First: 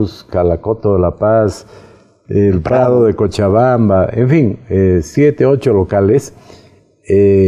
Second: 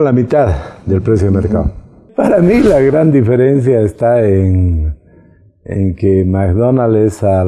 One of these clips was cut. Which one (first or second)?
second